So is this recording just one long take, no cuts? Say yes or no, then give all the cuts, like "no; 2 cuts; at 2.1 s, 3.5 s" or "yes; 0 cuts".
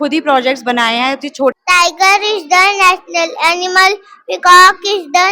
no; 1 cut; at 1.5 s